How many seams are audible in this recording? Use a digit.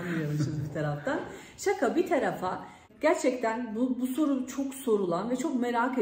1